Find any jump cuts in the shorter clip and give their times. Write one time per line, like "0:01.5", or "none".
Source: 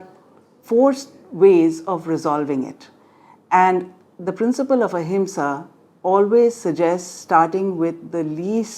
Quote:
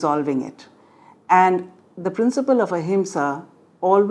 none